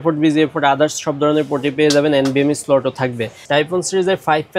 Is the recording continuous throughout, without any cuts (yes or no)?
no